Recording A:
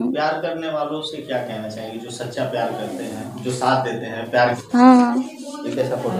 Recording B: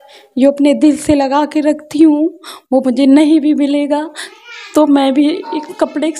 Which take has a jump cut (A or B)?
A